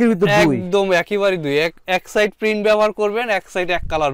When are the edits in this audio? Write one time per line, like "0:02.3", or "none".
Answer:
none